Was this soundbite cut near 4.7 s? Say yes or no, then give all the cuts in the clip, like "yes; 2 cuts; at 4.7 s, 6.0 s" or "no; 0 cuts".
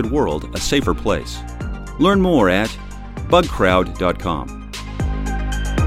yes; 1 cut; at 4.7 s